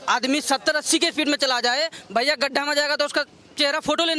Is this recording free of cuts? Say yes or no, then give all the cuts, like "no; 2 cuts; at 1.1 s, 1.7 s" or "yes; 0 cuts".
yes; 0 cuts